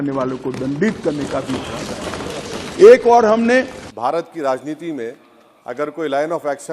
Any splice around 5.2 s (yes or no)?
no